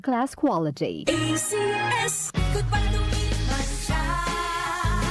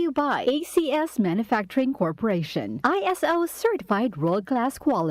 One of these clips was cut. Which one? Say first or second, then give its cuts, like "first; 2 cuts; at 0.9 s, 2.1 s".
first; 1 cut; at 2.2 s